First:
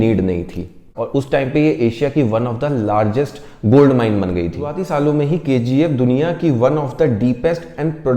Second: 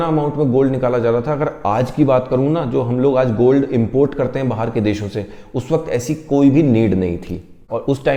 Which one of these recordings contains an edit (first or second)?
first